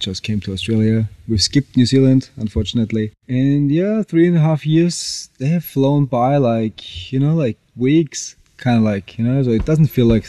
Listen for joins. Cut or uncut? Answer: uncut